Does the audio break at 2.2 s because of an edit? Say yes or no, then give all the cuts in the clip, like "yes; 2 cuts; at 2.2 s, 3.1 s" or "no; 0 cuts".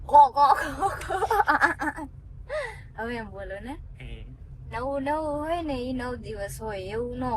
no; 0 cuts